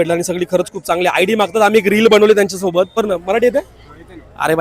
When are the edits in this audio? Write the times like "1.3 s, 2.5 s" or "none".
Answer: 3.0 s